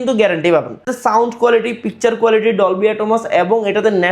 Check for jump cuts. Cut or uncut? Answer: cut